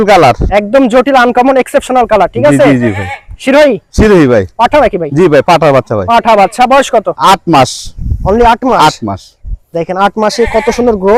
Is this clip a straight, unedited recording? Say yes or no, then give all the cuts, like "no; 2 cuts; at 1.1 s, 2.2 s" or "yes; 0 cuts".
yes; 0 cuts